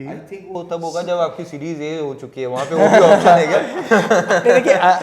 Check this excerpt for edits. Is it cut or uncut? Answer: uncut